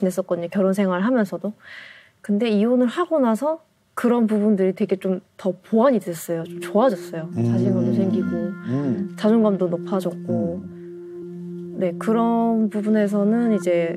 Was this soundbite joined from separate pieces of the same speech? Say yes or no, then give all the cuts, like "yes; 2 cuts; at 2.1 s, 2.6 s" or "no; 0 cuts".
no; 0 cuts